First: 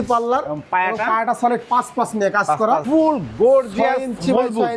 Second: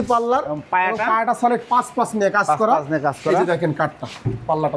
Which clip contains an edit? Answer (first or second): first